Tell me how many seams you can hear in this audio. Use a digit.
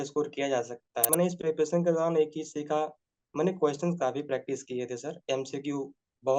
1